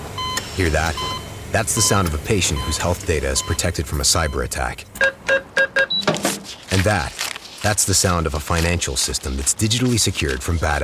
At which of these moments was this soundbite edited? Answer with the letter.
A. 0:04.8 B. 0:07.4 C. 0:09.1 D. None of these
D